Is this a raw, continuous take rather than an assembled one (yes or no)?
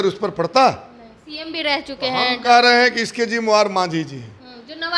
yes